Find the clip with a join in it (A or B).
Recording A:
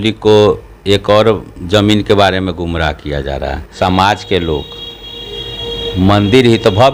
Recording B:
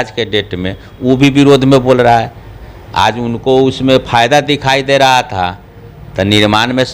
A